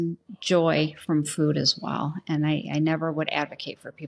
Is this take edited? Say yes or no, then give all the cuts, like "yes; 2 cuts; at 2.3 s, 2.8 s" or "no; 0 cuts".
no; 0 cuts